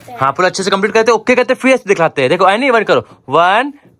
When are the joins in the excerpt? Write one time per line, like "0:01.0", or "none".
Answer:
none